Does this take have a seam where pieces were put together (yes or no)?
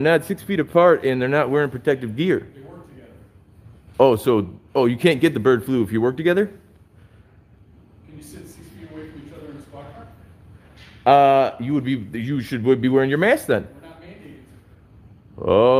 no